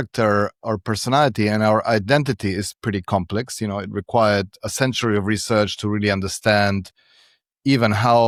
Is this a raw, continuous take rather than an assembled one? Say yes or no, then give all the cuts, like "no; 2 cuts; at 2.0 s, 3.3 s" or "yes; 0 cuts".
yes; 0 cuts